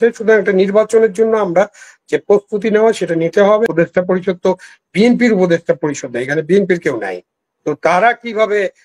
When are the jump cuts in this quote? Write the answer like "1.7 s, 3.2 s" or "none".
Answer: 3.7 s